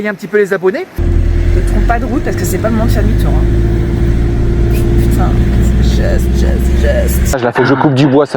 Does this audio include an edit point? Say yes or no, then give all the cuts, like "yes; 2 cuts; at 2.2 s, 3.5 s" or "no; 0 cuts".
yes; 2 cuts; at 1.0 s, 7.4 s